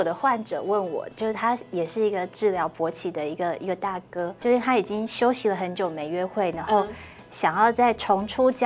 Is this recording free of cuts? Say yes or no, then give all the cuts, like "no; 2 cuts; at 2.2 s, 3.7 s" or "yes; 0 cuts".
no; 2 cuts; at 1.1 s, 4.4 s